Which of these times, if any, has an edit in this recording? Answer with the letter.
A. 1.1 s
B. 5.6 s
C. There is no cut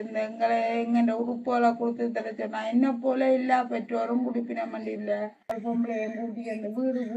B